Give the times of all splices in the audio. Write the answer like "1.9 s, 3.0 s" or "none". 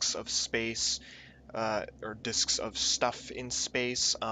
none